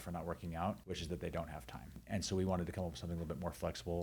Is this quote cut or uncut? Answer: cut